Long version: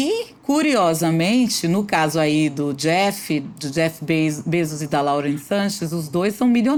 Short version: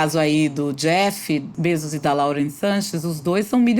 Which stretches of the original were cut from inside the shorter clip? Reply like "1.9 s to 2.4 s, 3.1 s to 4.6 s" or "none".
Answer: 3.5 s to 4.4 s